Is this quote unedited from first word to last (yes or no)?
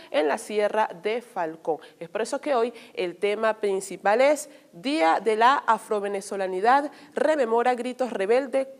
yes